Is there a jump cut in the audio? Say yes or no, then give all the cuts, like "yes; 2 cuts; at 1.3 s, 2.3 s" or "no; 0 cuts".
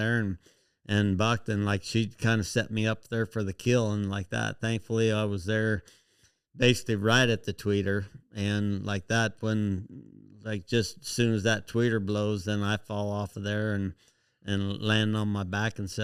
no; 0 cuts